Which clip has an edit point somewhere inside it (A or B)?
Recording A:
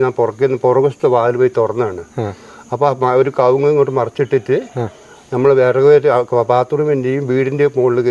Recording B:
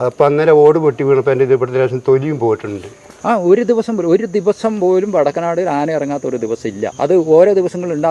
B